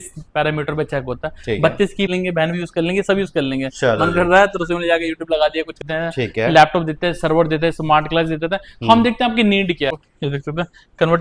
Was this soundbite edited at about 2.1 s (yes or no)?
yes